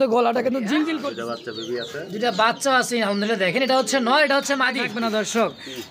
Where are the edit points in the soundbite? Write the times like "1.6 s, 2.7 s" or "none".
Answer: 1.1 s, 4.8 s

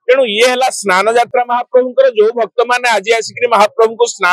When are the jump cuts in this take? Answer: none

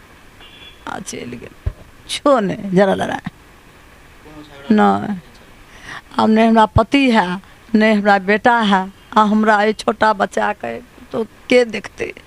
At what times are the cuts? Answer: 2.1 s

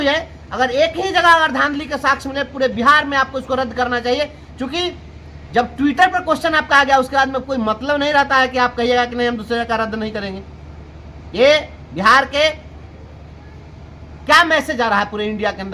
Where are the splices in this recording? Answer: none

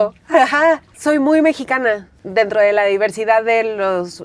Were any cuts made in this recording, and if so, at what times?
0.9 s, 2.1 s

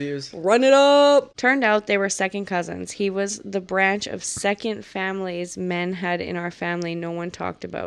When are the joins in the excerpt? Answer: 1.3 s

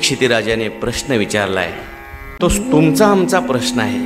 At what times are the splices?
2.2 s

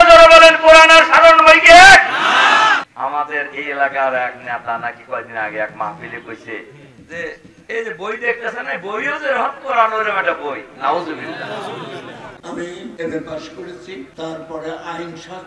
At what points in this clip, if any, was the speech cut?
2.8 s, 12.3 s, 14.1 s

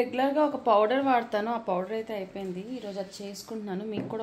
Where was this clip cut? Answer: none

